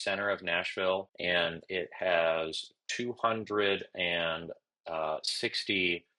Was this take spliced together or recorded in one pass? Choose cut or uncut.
cut